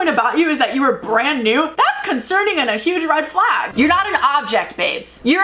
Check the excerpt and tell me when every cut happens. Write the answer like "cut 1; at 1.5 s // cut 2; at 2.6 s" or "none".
cut 1; at 3.7 s